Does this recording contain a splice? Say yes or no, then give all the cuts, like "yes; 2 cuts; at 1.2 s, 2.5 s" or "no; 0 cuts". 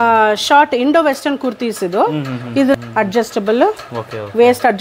yes; 1 cut; at 2.7 s